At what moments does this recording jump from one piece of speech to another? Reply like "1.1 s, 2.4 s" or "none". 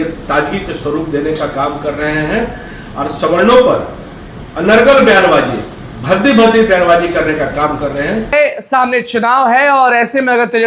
8.3 s